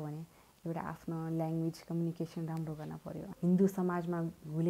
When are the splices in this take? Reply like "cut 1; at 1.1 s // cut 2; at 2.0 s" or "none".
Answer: cut 1; at 3.3 s